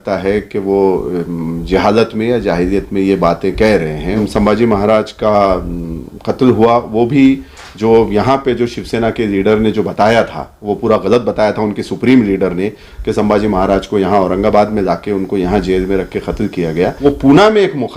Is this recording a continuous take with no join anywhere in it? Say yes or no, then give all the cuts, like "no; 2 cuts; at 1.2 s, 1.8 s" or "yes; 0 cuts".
no; 2 cuts; at 4.2 s, 16.9 s